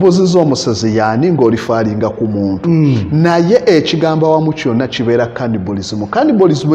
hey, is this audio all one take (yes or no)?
yes